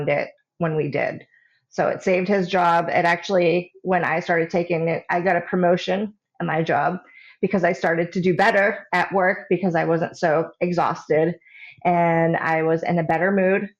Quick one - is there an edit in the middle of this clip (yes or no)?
no